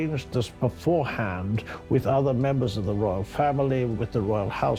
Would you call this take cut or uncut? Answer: uncut